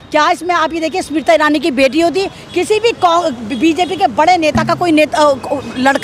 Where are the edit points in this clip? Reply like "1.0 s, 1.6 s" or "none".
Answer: none